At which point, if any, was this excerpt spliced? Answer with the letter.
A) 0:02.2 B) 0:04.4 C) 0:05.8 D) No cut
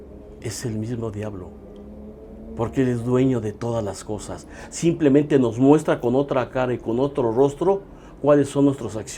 D